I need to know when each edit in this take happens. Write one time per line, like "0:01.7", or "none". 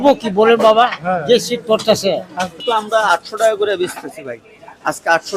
0:02.6